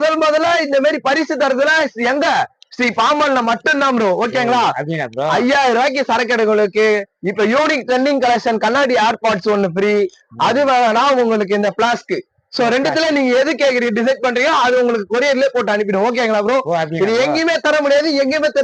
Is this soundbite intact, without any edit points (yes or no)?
yes